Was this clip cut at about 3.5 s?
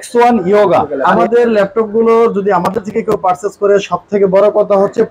no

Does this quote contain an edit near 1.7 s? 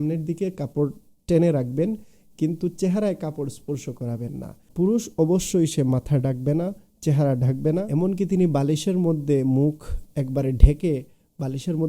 no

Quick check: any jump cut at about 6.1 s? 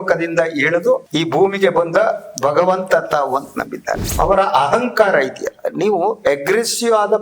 no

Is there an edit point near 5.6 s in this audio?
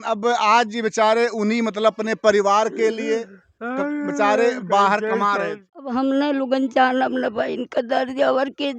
yes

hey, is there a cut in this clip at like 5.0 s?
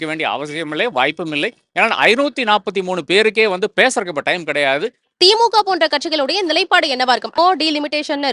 yes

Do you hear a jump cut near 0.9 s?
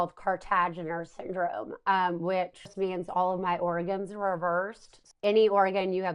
no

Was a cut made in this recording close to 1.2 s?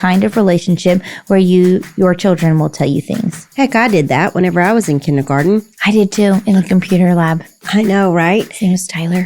no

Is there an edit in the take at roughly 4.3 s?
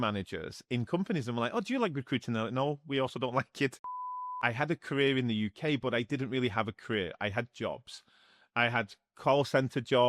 yes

